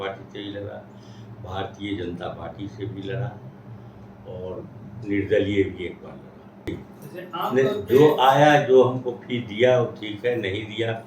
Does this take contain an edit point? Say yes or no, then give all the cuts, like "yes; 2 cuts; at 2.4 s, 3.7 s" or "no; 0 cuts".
yes; 1 cut; at 6.8 s